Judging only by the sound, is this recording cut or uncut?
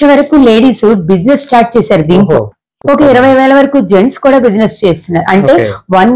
uncut